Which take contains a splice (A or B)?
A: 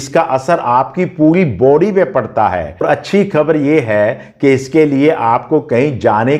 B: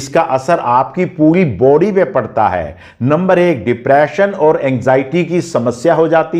A